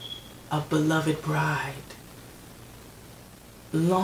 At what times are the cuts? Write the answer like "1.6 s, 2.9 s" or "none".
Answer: none